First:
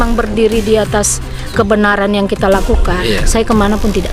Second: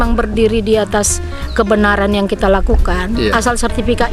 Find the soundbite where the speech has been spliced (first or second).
first